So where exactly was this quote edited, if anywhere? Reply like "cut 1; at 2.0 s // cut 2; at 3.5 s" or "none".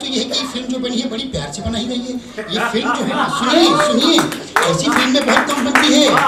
none